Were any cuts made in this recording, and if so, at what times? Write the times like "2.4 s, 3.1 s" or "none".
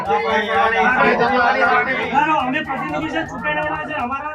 2.0 s